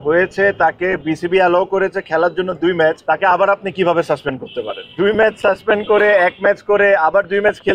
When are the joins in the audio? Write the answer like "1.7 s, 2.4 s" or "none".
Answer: 3.0 s, 4.8 s